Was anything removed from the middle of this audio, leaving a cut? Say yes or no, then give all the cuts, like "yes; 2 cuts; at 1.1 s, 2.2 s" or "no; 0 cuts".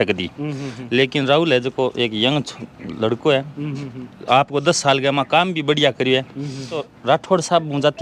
yes; 1 cut; at 6.9 s